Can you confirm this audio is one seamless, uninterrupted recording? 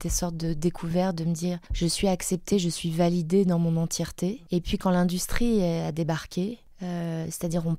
no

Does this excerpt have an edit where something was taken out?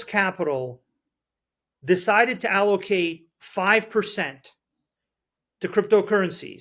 no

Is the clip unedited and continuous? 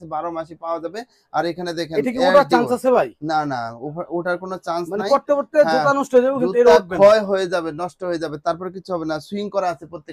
yes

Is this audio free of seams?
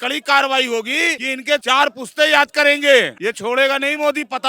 no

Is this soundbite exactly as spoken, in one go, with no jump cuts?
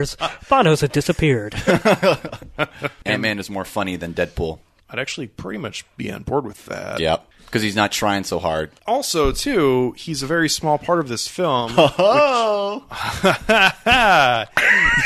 no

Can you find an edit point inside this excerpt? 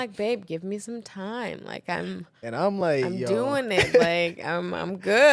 no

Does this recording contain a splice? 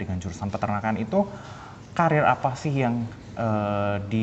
no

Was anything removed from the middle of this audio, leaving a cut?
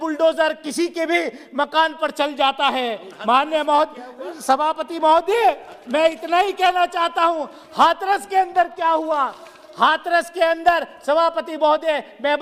no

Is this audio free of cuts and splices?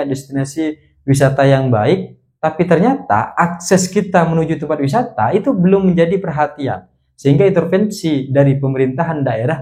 yes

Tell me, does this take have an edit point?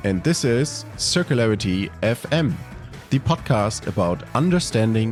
no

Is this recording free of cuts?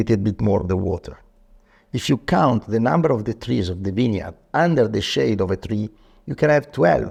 yes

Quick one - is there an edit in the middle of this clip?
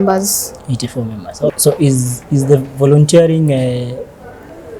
yes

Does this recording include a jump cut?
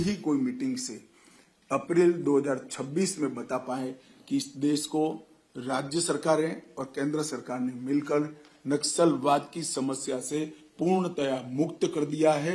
no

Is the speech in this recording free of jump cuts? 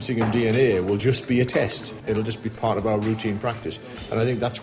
no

